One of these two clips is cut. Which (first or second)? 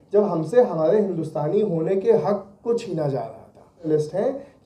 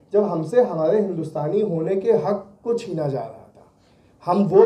first